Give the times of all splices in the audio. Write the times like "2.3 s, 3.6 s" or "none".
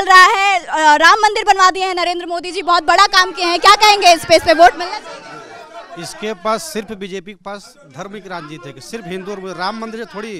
none

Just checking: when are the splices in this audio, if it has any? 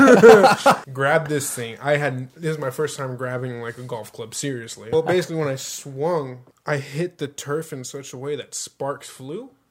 0.9 s, 4.9 s, 6.5 s

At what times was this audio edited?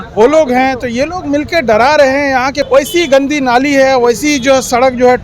2.6 s

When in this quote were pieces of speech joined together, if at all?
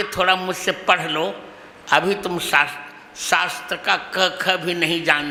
none

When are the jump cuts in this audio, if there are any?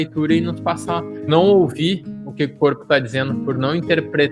1.3 s

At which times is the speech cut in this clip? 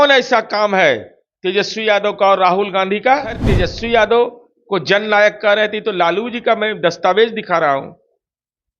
3.5 s

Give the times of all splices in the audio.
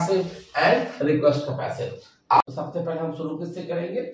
2.4 s

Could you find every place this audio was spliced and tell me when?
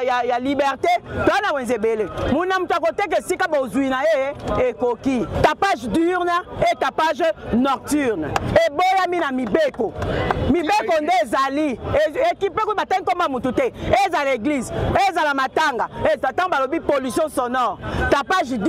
5.3 s

